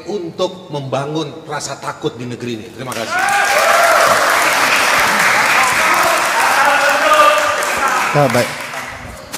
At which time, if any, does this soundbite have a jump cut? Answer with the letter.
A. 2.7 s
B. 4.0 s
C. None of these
C